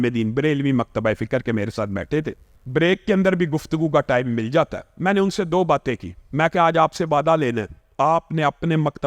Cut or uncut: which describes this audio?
cut